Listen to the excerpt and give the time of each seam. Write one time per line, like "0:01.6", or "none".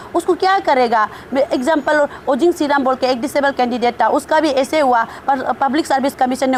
none